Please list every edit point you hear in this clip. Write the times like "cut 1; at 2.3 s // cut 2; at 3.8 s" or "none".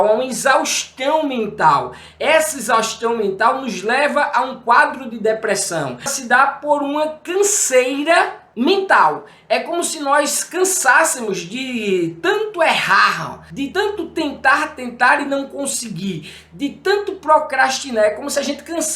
cut 1; at 6.2 s // cut 2; at 8.4 s